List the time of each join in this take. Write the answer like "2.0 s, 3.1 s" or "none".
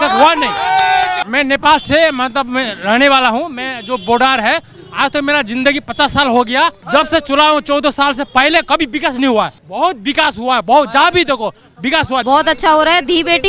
1.2 s, 6.8 s, 9.6 s, 12.2 s